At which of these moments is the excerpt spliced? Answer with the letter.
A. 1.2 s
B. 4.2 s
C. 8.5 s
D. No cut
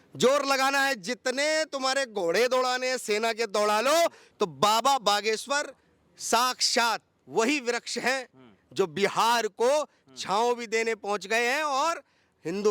B